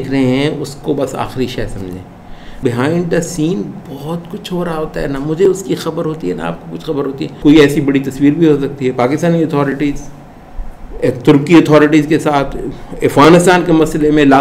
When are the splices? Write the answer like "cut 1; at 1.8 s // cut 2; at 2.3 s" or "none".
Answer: cut 1; at 2.6 s // cut 2; at 7.3 s